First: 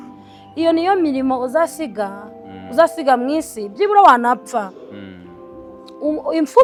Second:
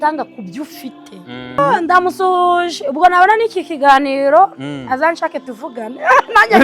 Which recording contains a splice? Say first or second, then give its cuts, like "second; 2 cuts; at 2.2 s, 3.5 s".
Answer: second; 1 cut; at 1.6 s